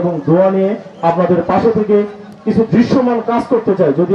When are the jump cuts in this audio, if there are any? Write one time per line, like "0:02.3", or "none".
none